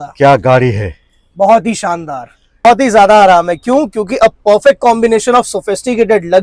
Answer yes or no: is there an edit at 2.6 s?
yes